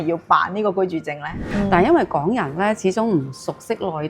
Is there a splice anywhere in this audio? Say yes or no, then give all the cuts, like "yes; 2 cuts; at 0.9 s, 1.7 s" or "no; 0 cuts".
yes; 1 cut; at 1.5 s